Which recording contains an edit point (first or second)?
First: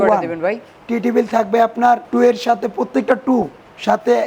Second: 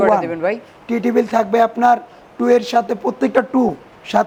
first